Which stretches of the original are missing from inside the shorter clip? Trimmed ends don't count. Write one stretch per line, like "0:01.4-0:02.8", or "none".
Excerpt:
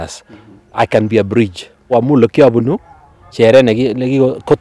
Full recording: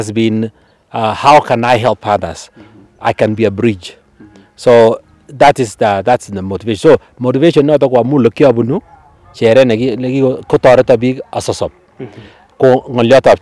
0:04.2-0:07.9

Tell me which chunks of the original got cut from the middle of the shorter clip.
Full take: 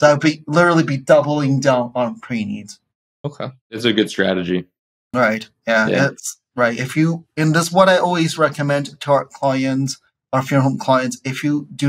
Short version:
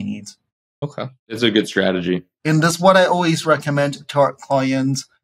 0:04.8-0:07.3

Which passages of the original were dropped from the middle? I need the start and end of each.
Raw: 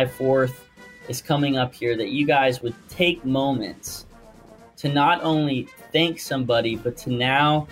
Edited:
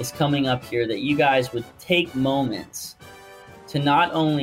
none

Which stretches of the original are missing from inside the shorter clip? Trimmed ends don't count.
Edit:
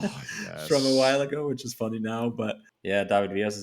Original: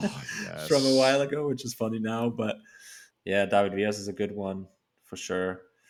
0:02.7-0:03.1

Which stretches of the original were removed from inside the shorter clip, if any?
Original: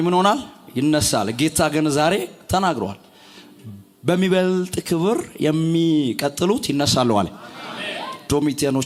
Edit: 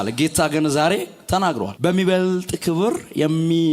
0:02.9-0:04.0

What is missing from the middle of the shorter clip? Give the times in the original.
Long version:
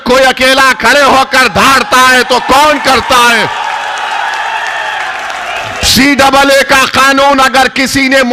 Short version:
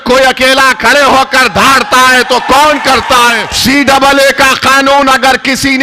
0:03.5-0:05.8

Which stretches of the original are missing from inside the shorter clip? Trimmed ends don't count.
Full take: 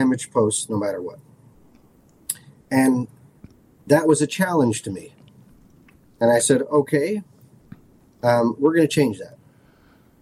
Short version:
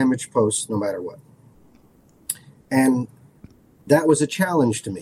none

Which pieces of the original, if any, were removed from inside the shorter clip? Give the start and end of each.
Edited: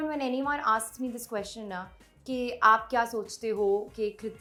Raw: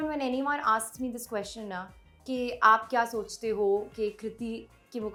none

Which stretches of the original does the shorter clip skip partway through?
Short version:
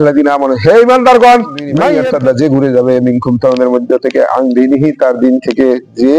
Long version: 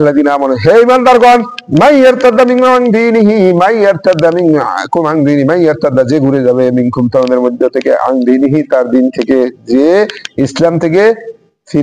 0:01.8-0:05.5

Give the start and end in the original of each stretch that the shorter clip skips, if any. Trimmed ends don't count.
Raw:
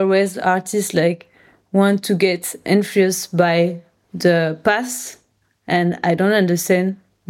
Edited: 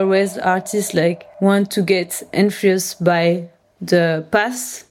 0:01.3-0:01.6

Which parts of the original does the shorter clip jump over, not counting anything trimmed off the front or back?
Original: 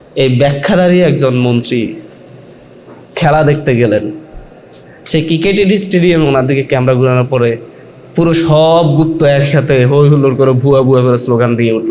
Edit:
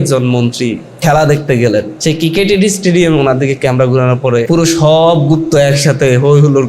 0:02.0-0:03.1
0:04.1-0:05.0
0:07.5-0:08.1

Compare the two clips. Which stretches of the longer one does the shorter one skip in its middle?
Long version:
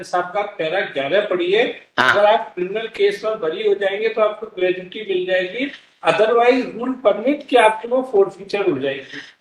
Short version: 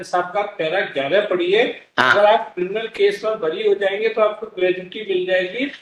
none

